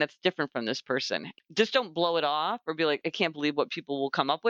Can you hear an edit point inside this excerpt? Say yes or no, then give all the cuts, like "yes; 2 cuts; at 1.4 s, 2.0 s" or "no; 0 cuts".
yes; 2 cuts; at 1.3 s, 3.0 s